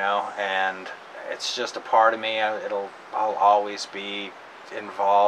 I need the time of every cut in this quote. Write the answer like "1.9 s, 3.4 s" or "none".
none

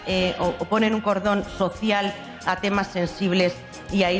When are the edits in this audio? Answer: 2.9 s

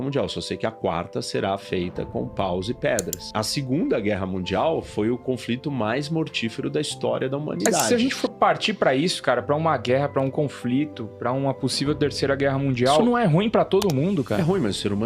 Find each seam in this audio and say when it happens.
7.9 s, 13.0 s, 14.4 s

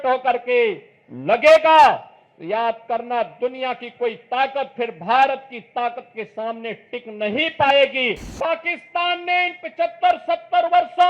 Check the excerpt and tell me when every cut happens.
8.2 s

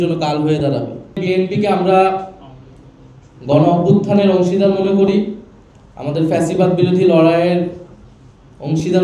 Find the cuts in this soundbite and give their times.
1.2 s

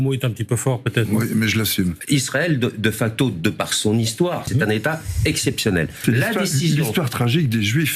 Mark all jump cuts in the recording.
2.0 s, 4.5 s, 6.0 s

